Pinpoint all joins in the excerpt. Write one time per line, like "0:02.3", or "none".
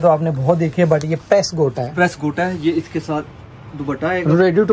none